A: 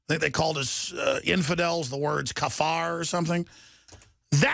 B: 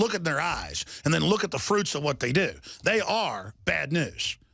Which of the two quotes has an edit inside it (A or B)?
A